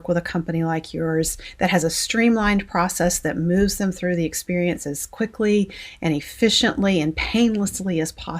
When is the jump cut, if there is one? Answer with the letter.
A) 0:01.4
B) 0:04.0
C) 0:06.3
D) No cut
A